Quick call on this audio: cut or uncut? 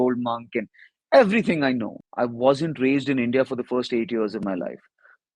cut